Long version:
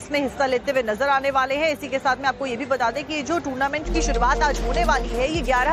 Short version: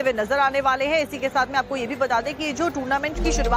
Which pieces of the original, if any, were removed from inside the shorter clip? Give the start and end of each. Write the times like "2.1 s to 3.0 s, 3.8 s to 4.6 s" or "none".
none